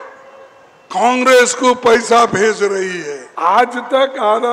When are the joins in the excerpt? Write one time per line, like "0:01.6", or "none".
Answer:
0:03.2